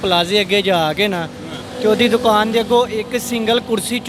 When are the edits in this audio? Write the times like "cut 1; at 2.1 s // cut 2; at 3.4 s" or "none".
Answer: none

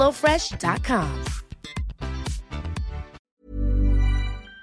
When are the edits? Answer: cut 1; at 3.2 s

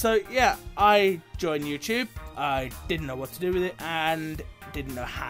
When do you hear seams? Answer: none

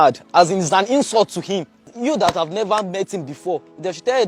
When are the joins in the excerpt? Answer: cut 1; at 1.9 s

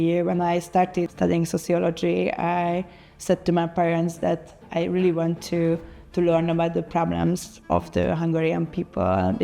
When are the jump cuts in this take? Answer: cut 1; at 1.1 s // cut 2; at 7.5 s

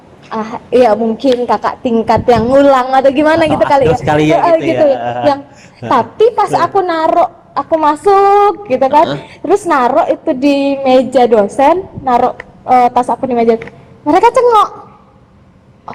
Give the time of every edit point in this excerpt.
none

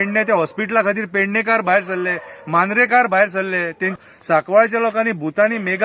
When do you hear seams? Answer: cut 1; at 4.0 s

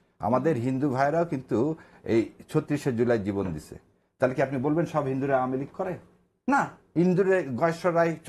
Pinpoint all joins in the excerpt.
none

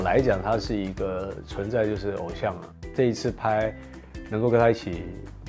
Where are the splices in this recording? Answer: cut 1; at 2.8 s

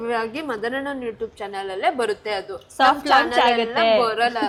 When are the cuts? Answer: none

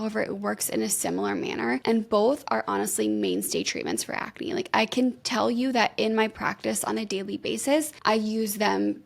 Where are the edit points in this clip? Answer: cut 1; at 1.8 s // cut 2; at 5.2 s // cut 3; at 7.9 s

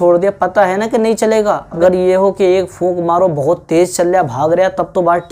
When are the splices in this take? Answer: cut 1; at 1.8 s

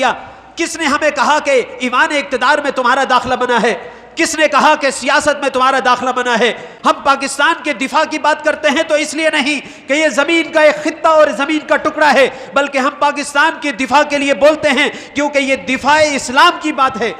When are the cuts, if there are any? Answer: cut 1; at 6.7 s

